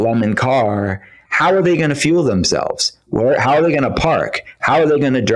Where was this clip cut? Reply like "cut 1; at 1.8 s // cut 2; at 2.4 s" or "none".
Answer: none